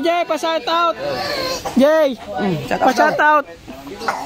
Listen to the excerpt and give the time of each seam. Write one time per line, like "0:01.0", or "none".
none